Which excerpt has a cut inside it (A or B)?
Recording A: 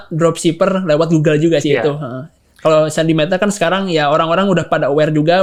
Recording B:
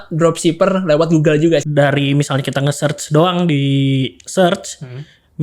B